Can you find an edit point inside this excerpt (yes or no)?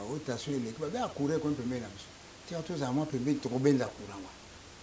no